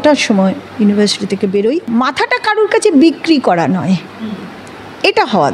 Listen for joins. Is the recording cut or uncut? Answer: cut